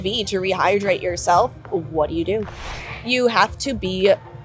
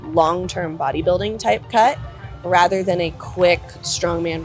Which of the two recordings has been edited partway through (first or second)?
first